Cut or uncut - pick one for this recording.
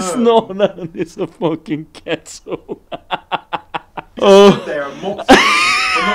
cut